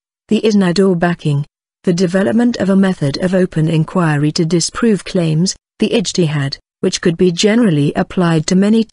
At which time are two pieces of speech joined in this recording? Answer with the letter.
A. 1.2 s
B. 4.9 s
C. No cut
A